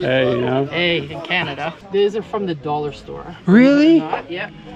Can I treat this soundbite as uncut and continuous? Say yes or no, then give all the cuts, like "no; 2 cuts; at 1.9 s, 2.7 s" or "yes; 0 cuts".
no; 1 cut; at 1.7 s